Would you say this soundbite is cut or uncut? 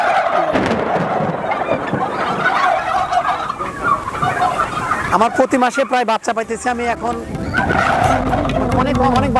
uncut